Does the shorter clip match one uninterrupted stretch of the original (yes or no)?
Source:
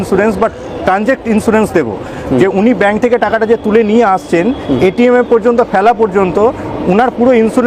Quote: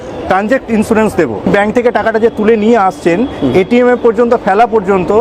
no